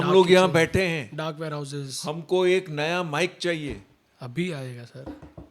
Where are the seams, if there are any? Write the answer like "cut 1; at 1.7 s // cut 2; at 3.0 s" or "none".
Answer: none